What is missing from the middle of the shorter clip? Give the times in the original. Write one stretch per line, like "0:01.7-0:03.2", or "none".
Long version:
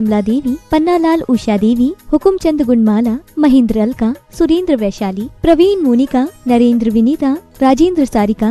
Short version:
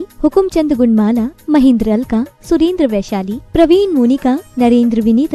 none